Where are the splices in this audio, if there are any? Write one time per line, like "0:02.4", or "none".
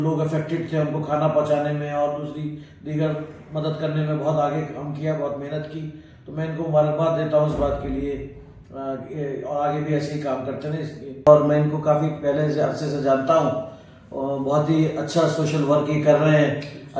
none